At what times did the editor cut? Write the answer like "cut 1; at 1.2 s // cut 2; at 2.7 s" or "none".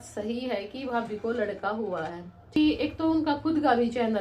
cut 1; at 2.6 s